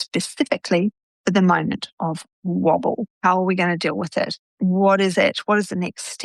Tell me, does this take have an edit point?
yes; 1 cut; at 3.1 s

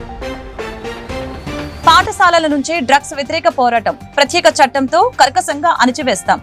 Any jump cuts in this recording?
yes; 1 cut; at 1.8 s

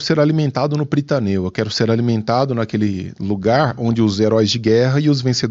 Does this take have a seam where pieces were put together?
no; 0 cuts

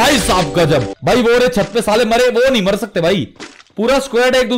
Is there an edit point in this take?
yes; 1 cut; at 0.9 s

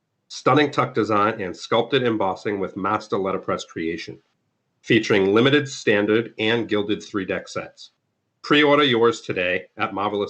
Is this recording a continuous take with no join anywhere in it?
yes; 0 cuts

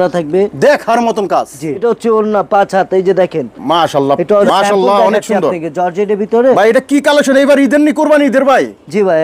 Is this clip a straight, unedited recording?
no; 2 cuts; at 1.8 s, 4.5 s

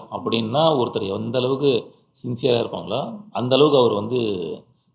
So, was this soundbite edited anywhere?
no; 0 cuts

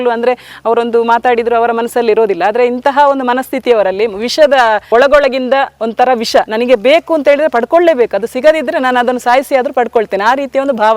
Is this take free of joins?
no; 1 cut; at 4.8 s

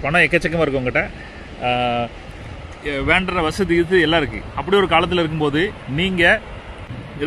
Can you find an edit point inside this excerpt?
no; 0 cuts

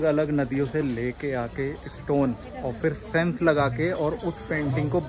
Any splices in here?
no; 0 cuts

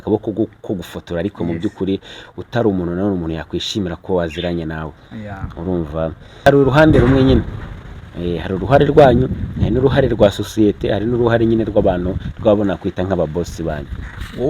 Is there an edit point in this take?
yes; 1 cut; at 6.4 s

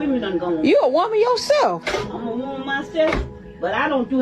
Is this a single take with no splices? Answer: no; 1 cut; at 1.8 s

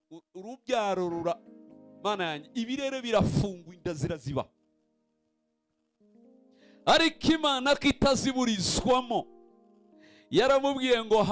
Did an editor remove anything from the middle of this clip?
no; 0 cuts

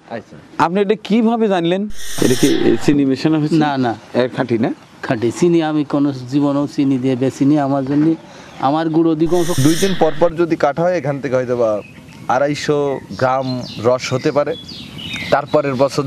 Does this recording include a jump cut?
yes; 2 cuts; at 2.0 s, 9.6 s

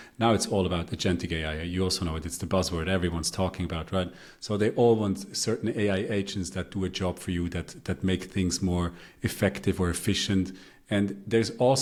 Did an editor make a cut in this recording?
no; 0 cuts

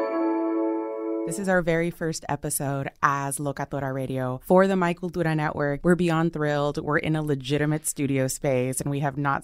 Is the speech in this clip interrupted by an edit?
yes; 1 cut; at 1.2 s

